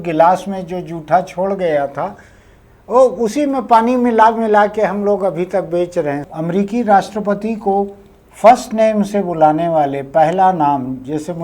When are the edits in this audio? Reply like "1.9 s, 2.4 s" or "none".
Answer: 6.3 s